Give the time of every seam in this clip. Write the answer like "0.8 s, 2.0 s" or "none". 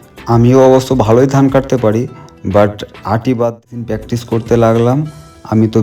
3.7 s